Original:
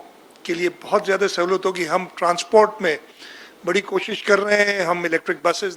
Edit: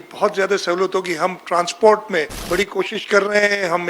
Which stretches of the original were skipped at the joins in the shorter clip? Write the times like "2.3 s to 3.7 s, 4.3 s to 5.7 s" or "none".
3.1 s to 3.5 s